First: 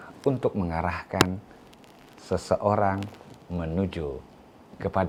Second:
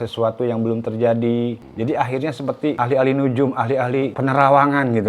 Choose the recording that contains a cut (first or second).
second